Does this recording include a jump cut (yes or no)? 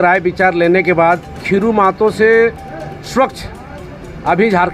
yes